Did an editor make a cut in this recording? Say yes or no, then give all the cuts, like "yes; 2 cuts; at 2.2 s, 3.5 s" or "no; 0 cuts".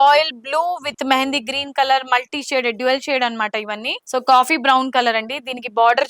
yes; 1 cut; at 4.0 s